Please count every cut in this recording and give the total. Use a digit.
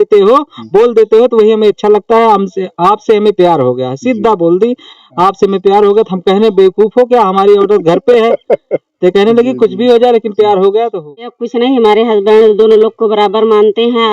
1